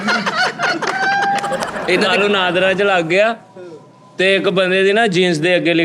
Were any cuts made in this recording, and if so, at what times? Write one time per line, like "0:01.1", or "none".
0:01.8